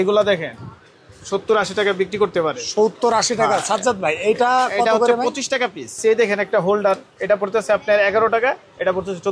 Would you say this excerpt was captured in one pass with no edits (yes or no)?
no